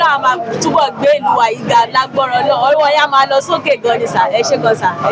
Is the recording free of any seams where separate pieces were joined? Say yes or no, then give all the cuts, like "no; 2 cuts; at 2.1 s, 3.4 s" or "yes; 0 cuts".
yes; 0 cuts